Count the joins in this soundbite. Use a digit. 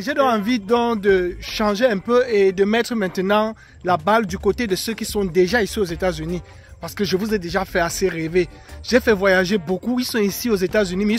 0